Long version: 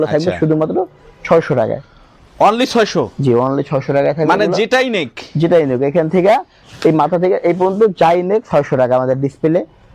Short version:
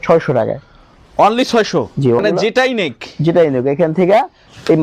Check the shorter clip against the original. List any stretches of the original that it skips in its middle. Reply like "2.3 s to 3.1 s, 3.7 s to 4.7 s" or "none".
3.4 s to 4.4 s

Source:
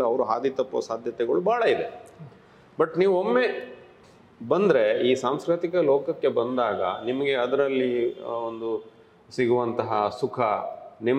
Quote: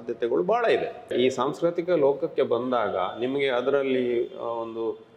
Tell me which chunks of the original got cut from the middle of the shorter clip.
2.1 s to 5.0 s

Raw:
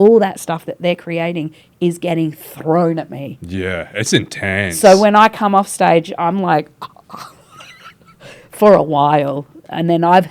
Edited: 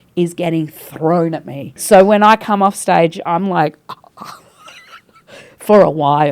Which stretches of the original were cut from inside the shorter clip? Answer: 3.4 s to 4.7 s

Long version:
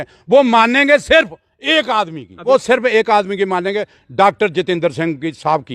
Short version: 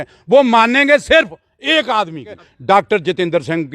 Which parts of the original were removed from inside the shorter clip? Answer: 2.3 s to 3.8 s

